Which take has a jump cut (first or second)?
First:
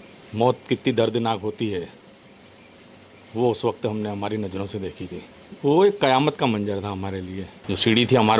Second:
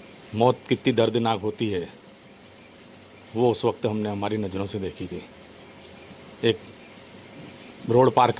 first